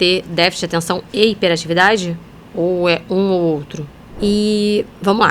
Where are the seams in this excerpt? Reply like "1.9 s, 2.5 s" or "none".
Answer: 4.1 s